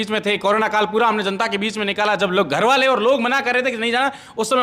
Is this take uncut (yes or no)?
yes